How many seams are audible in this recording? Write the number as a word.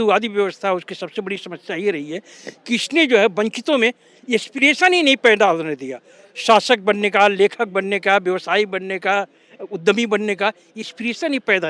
zero